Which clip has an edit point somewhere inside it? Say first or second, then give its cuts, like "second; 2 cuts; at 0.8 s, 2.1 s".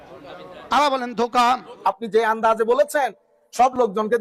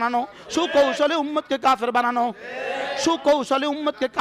first; 1 cut; at 1.7 s